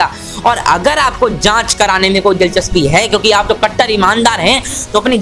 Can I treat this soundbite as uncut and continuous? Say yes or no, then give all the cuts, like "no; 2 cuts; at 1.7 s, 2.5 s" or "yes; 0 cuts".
yes; 0 cuts